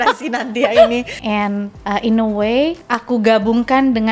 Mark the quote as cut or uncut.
cut